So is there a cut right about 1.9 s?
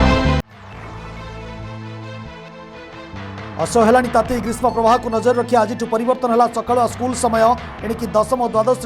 yes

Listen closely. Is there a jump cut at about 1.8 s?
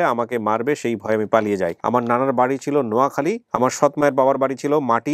yes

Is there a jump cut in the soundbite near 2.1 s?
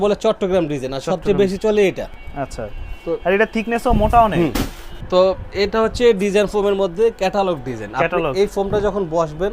no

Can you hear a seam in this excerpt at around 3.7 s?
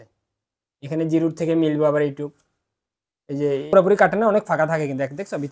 yes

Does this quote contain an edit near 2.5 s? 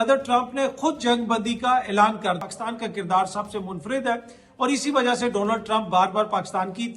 yes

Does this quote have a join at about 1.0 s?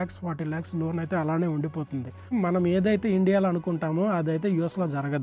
no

